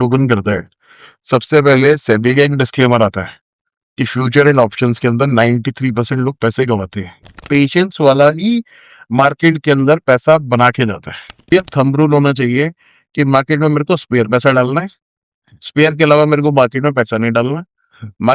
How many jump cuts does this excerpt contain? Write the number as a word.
two